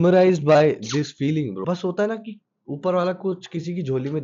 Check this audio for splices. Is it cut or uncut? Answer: cut